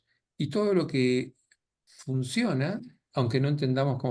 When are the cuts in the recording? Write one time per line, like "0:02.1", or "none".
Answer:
none